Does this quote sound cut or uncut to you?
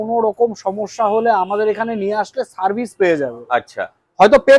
uncut